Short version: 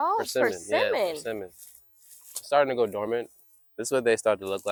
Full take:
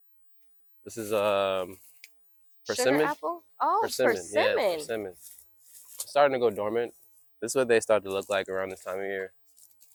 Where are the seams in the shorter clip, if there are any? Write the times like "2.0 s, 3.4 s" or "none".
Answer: none